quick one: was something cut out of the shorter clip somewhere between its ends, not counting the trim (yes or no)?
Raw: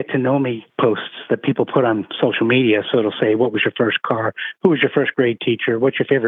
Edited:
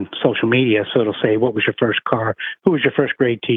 no